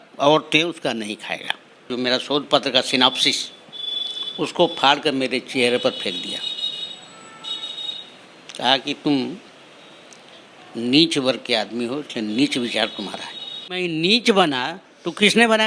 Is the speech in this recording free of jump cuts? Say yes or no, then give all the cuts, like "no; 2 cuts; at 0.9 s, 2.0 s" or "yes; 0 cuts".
no; 2 cuts; at 1.9 s, 13.8 s